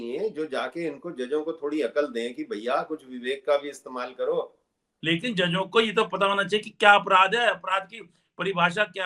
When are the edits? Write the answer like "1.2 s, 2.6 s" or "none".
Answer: 4.9 s